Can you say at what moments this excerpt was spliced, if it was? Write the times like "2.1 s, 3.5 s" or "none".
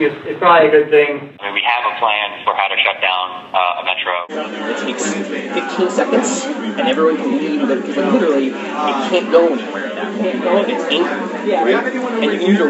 1.4 s, 4.3 s